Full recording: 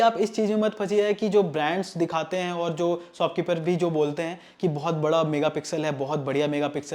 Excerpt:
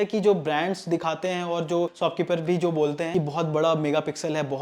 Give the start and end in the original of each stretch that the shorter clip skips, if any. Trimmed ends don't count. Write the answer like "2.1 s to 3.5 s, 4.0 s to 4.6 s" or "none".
3.0 s to 3.1 s, 4.2 s to 4.5 s